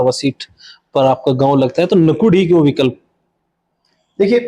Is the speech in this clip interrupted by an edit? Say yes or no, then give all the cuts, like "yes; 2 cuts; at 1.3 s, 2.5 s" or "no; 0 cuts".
no; 0 cuts